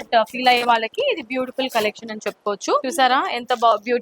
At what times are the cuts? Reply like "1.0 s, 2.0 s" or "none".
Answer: 2.8 s